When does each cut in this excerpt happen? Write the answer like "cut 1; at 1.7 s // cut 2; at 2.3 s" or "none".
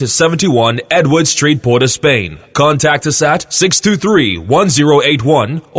cut 1; at 2.4 s